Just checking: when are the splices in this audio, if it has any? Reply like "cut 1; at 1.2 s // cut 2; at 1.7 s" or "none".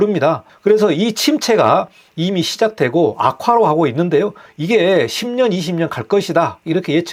none